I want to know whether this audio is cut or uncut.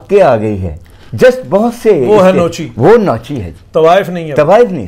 uncut